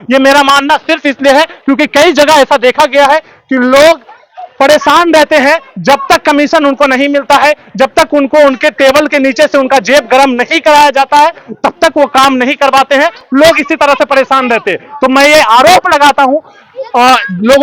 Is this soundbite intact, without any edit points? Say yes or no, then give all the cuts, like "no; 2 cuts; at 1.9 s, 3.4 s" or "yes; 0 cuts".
yes; 0 cuts